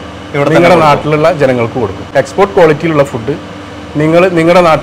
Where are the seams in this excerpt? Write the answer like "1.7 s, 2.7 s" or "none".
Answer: 2.0 s